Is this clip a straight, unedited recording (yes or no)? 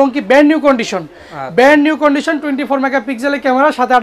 yes